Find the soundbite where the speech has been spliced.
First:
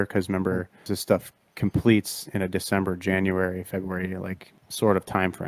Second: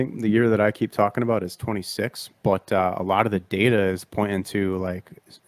first; 2 cuts; at 0.9 s, 4.6 s

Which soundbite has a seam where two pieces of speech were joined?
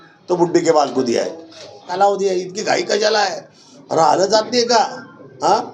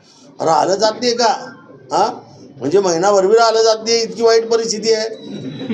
first; 1 cut; at 2.0 s

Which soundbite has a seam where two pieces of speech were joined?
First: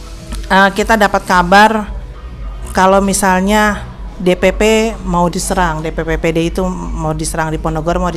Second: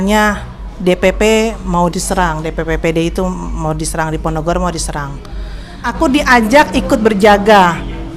second; 1 cut; at 5.8 s

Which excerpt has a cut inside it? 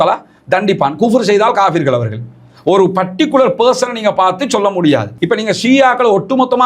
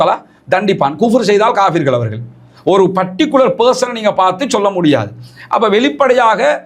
first; 1 cut; at 5.1 s

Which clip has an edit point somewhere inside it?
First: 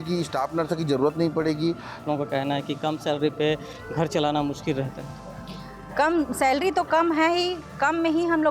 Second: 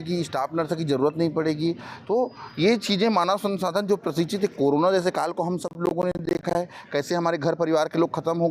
first; 1 cut; at 2.0 s

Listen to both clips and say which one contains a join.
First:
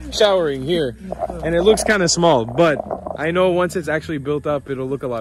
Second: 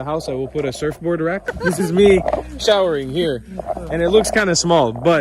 second; 1 cut; at 1.5 s

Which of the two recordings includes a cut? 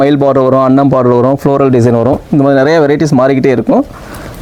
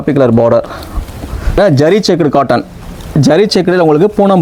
second; 1 cut; at 1.6 s

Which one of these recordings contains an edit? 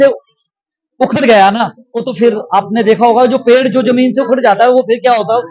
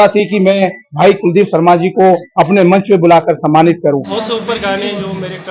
second; 1 cut; at 4.1 s

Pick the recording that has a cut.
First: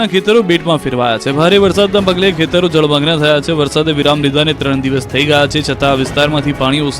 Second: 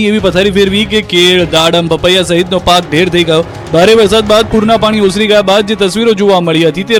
first; 1 cut; at 5.2 s

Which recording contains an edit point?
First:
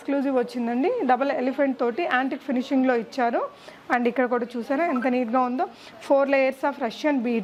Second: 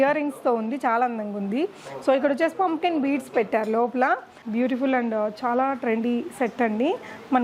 second; 1 cut; at 4.4 s

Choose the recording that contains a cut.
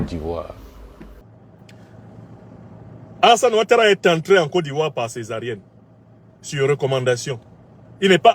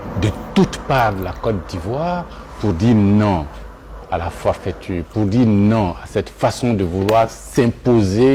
first; 1 cut; at 1.2 s

